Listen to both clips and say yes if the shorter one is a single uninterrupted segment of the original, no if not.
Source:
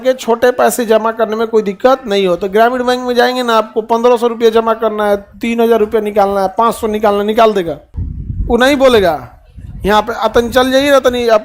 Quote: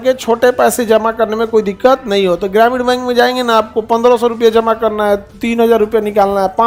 yes